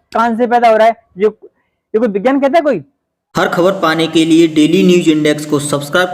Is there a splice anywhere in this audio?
yes; 1 cut; at 3.2 s

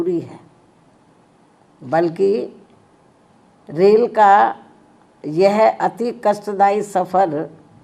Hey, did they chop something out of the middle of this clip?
no; 0 cuts

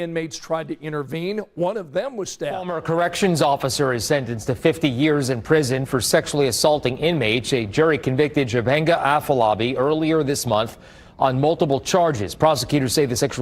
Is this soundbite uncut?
no; 1 cut; at 2.7 s

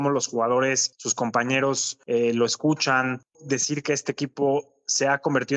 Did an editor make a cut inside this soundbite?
yes; 1 cut; at 3.3 s

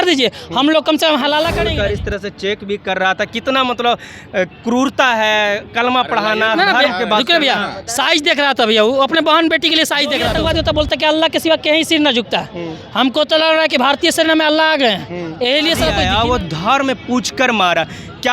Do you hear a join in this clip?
yes; 3 cuts; at 1.6 s, 10.3 s, 16.0 s

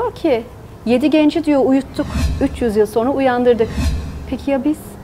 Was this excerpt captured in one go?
no; 1 cut; at 2.2 s

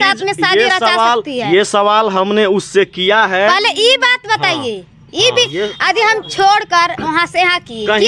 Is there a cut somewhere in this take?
no; 0 cuts

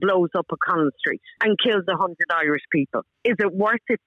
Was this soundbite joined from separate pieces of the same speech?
yes; 2 cuts; at 1.3 s, 3.1 s

